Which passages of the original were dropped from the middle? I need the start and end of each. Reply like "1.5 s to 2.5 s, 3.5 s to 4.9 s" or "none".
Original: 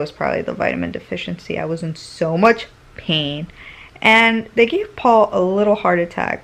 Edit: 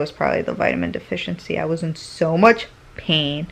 none